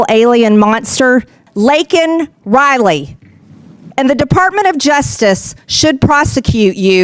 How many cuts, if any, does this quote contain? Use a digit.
1